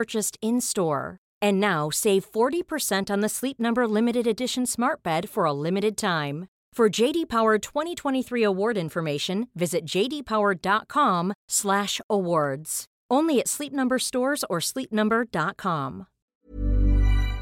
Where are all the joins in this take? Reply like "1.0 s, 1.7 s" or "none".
16.3 s